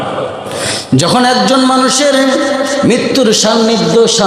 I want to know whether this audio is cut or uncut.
uncut